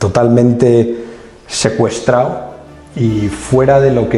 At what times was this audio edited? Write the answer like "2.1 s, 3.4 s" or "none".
none